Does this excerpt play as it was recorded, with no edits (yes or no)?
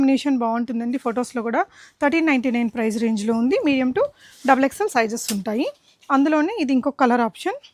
yes